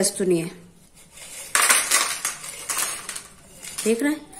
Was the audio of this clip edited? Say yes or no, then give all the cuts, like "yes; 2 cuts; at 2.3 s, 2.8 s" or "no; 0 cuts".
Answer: no; 0 cuts